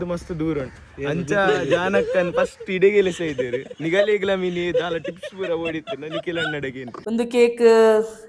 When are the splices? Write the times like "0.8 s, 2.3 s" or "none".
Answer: 6.9 s